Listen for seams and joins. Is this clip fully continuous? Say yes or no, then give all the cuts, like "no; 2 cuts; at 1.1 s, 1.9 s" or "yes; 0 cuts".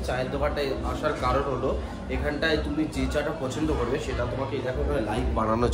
yes; 0 cuts